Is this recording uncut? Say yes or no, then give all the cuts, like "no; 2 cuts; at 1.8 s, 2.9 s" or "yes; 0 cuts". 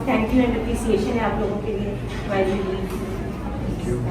yes; 0 cuts